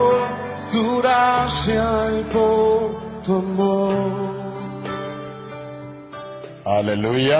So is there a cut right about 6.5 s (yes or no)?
yes